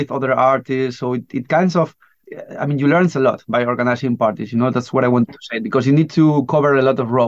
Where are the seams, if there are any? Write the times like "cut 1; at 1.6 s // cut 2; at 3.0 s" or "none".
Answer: none

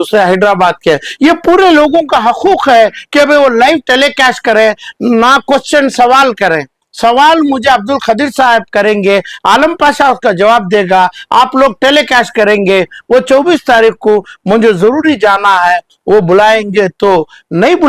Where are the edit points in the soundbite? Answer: none

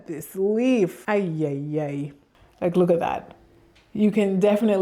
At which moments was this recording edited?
cut 1; at 1.0 s // cut 2; at 2.2 s

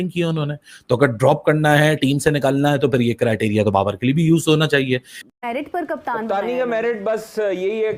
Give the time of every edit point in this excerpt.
cut 1; at 5.4 s

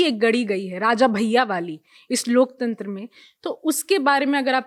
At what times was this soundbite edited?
none

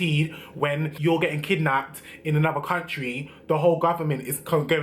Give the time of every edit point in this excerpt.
cut 1; at 0.9 s

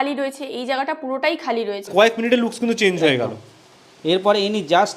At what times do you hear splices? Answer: cut 1; at 1.9 s

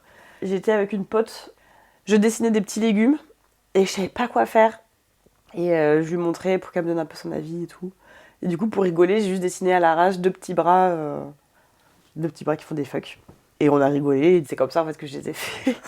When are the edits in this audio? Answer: none

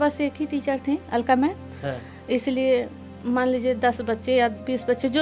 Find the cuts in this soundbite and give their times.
cut 1; at 3.0 s

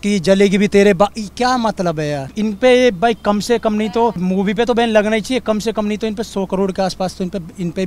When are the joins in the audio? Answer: cut 1; at 2.3 s // cut 2; at 4.2 s

